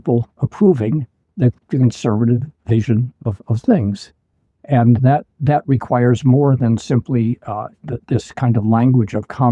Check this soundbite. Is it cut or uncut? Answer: uncut